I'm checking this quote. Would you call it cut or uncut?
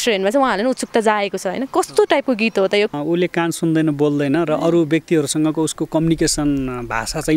cut